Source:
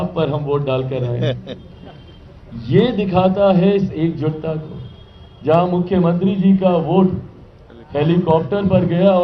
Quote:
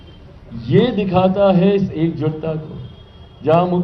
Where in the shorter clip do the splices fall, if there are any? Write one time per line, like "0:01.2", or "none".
none